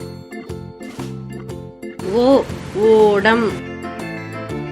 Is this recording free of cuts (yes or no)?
no